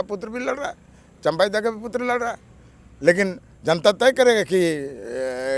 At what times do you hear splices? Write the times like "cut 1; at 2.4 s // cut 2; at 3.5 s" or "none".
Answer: none